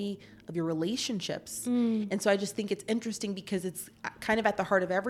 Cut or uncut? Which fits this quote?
uncut